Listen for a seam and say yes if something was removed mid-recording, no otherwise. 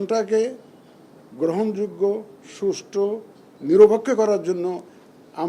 no